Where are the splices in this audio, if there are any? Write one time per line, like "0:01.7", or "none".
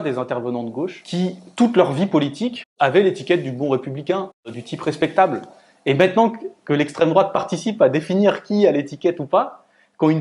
0:01.0
0:02.6
0:04.6